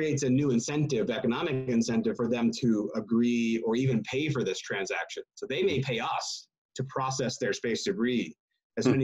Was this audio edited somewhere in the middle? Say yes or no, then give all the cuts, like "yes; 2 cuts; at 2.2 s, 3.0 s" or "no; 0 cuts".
no; 0 cuts